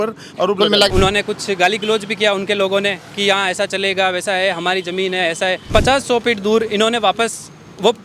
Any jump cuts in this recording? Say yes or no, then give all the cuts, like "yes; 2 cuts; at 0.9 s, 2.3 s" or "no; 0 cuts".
yes; 2 cuts; at 0.9 s, 5.7 s